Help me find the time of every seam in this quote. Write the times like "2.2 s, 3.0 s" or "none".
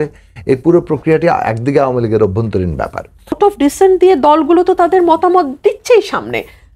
3.4 s